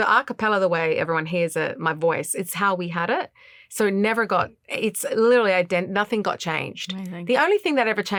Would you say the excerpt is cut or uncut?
uncut